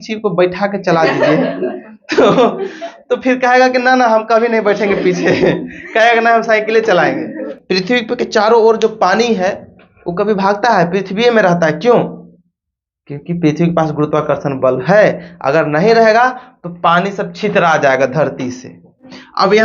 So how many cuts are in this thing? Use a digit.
1